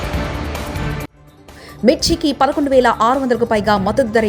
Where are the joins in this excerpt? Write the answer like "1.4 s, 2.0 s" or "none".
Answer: 1.2 s